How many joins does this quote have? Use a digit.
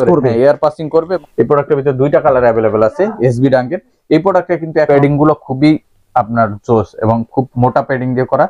2